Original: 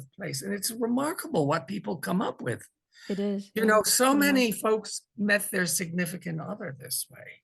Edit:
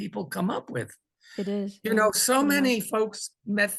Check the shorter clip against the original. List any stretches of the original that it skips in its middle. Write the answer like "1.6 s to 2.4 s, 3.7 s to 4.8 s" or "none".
none